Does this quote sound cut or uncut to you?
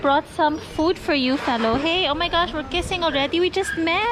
uncut